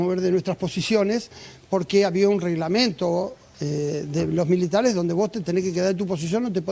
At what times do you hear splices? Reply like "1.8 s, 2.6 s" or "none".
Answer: none